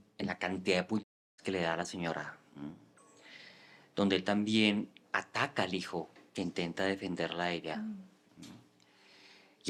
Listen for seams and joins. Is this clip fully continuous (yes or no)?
yes